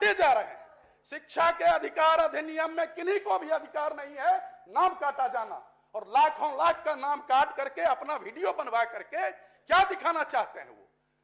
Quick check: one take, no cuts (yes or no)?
yes